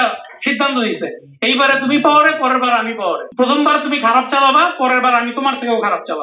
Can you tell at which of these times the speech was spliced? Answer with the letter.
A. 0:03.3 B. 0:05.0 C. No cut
A